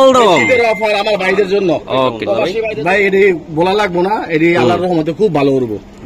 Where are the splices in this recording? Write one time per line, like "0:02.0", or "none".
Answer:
0:02.6